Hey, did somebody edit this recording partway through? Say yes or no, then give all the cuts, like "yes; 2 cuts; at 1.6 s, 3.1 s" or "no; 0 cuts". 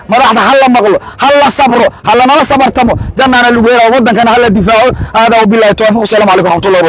no; 0 cuts